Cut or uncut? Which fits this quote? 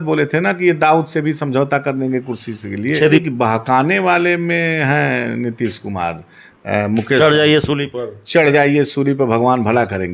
cut